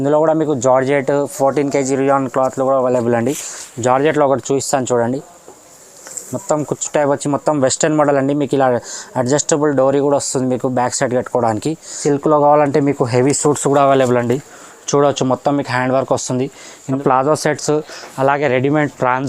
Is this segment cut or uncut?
cut